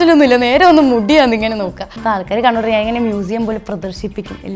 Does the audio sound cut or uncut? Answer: cut